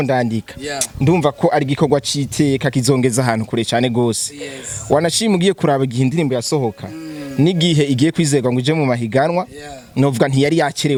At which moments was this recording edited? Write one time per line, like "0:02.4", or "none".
none